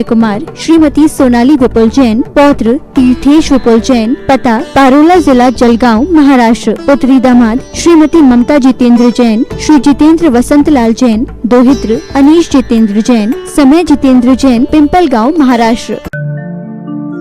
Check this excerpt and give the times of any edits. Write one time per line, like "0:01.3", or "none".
0:16.1